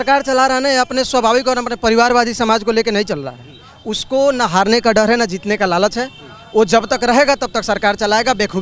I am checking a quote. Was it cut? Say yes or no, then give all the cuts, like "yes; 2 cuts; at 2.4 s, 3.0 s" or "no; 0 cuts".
no; 0 cuts